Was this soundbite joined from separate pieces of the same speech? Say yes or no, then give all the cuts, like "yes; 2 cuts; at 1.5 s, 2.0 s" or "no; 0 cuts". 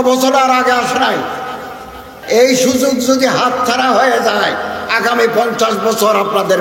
yes; 1 cut; at 2.1 s